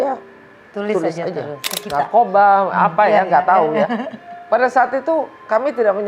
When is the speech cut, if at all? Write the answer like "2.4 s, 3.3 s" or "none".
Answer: 1.7 s